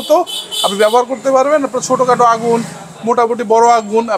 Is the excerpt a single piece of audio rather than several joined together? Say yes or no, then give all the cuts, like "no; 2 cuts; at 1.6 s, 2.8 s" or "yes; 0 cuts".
yes; 0 cuts